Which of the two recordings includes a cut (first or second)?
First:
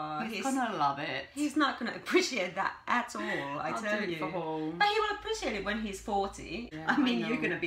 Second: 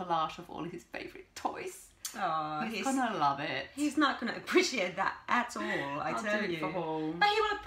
first